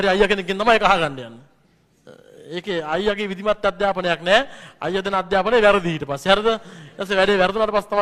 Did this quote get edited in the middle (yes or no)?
no